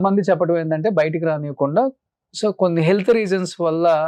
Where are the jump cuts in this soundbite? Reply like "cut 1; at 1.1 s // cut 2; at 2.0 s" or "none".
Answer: none